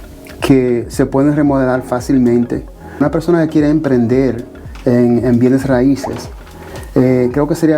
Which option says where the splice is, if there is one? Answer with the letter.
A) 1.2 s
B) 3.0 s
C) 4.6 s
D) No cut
B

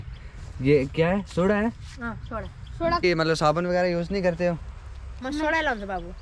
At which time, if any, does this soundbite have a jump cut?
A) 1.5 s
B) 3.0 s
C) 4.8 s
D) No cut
B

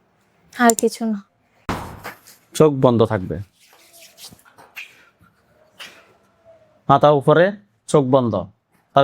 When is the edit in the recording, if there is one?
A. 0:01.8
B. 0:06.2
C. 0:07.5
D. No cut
A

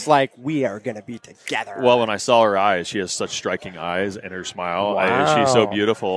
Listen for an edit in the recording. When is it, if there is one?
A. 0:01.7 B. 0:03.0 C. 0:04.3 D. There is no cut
D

